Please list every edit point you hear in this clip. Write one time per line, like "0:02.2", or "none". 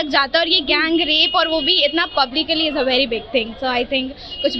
none

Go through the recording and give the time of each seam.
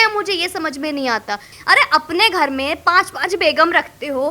0:01.5

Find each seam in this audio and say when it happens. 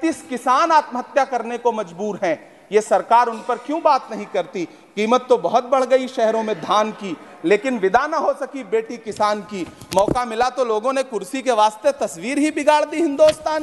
none

